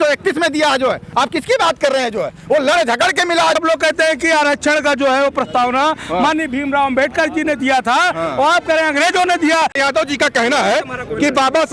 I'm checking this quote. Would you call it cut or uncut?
cut